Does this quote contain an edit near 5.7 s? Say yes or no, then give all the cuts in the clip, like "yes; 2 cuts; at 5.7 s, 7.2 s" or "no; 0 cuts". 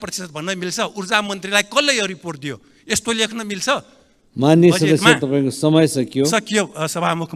no; 0 cuts